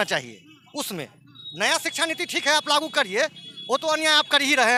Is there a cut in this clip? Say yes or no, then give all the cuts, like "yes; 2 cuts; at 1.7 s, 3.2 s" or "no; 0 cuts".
no; 0 cuts